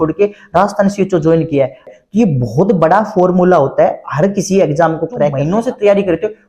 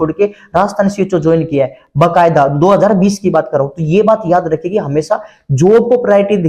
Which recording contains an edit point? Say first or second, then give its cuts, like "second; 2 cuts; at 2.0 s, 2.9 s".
first; 2 cuts; at 1.8 s, 5.4 s